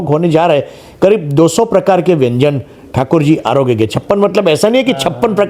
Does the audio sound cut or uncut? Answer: uncut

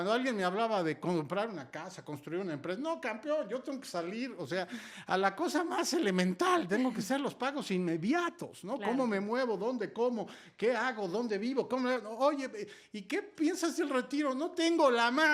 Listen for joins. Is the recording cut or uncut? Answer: uncut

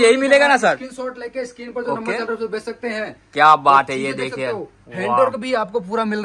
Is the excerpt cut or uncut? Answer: uncut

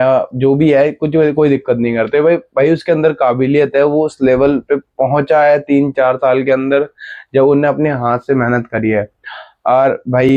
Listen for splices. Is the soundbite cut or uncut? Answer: uncut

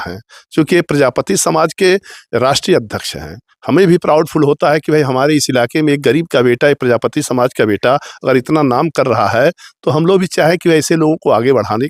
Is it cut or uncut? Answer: uncut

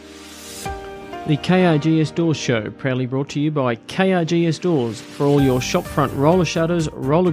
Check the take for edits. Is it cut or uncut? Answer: cut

